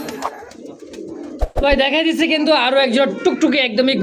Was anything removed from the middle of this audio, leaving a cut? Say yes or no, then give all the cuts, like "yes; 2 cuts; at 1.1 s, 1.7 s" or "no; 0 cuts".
yes; 1 cut; at 1.5 s